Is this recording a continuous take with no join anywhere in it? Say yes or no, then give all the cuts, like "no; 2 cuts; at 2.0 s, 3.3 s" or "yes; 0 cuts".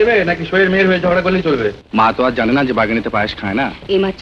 no; 1 cut; at 1.8 s